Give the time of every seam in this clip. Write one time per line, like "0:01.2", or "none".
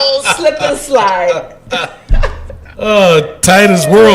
0:02.6